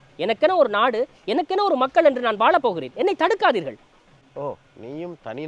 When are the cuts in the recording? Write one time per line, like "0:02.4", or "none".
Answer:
none